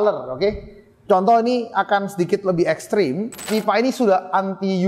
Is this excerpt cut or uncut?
cut